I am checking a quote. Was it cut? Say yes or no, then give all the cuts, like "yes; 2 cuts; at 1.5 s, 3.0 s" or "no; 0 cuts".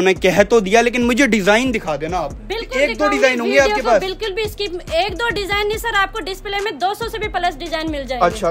no; 0 cuts